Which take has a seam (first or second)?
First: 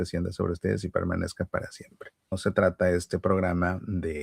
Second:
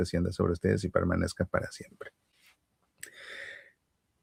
first